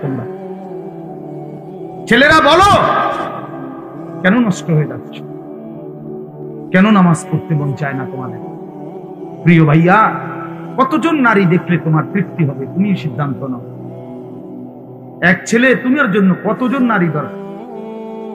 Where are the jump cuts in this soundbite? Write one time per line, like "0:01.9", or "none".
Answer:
0:04.9
0:06.7